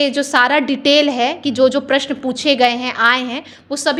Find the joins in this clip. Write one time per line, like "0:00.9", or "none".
none